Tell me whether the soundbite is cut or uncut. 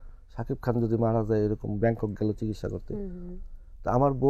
uncut